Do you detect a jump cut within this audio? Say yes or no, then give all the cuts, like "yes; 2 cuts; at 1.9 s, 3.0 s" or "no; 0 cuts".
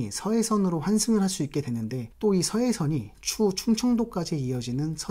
no; 0 cuts